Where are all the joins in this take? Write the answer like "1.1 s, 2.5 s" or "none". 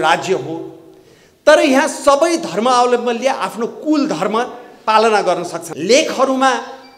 5.6 s